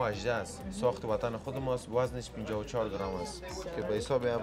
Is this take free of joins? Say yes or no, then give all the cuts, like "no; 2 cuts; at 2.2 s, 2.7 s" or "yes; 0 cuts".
yes; 0 cuts